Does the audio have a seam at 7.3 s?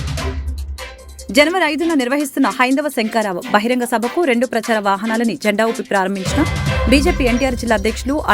no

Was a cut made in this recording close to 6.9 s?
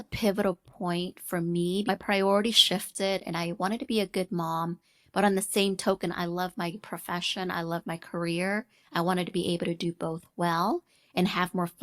no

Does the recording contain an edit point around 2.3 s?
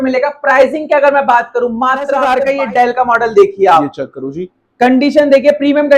yes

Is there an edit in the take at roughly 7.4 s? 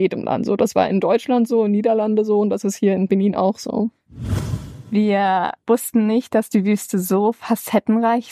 no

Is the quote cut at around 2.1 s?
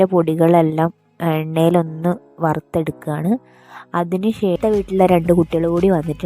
no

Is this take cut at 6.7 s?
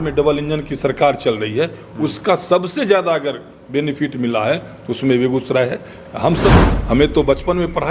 yes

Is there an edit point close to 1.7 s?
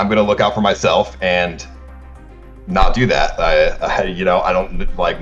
no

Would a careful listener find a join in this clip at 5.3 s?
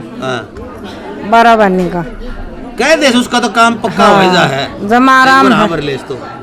yes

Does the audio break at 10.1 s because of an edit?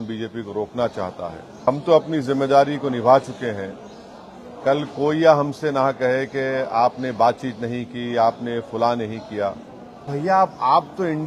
yes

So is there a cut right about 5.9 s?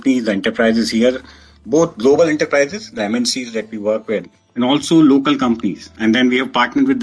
yes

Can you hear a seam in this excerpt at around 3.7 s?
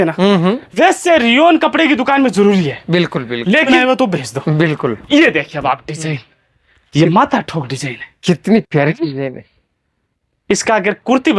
yes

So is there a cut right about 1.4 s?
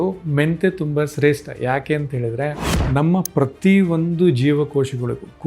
no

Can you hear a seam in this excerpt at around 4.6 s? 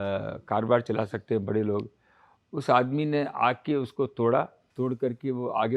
yes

